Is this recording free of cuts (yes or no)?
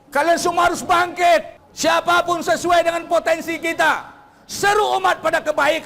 no